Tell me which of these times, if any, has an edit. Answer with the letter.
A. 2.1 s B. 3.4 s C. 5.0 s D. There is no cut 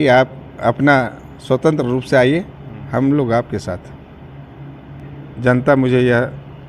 C